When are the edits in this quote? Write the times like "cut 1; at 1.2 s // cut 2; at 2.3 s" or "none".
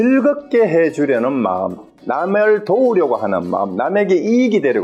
none